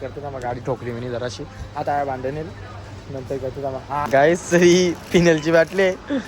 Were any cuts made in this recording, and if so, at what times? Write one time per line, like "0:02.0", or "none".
0:04.1